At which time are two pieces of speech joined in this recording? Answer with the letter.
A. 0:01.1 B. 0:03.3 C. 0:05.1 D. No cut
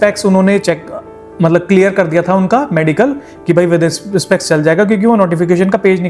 D